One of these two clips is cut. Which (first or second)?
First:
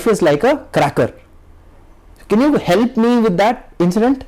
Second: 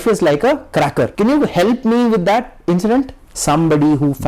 second